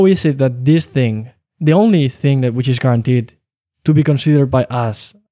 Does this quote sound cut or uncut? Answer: uncut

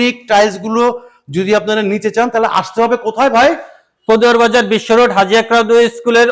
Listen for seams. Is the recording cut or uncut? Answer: uncut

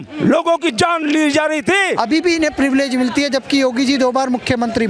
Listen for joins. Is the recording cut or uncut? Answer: cut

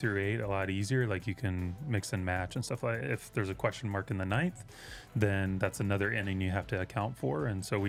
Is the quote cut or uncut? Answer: uncut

